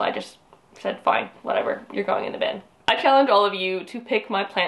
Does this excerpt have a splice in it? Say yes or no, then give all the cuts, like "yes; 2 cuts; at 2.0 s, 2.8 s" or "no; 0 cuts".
yes; 1 cut; at 2.7 s